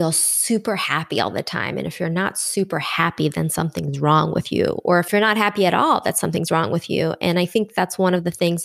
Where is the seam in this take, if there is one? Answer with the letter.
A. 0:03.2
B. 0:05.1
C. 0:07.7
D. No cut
B